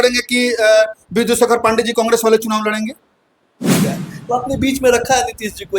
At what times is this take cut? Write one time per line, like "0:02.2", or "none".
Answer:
0:03.9